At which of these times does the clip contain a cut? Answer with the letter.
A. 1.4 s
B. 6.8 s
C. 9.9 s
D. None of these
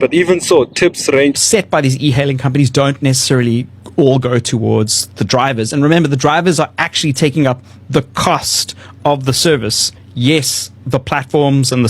A